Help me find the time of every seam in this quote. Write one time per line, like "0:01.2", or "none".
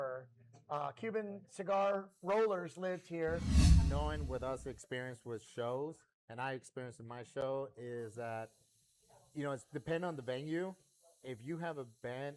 0:03.7